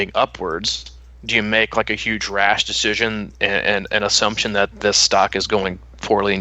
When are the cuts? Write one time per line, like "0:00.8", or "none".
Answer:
none